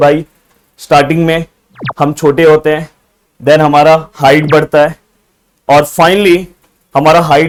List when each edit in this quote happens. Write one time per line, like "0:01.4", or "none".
none